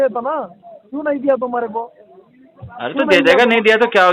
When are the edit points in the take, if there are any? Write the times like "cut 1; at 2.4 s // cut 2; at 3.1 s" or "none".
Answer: none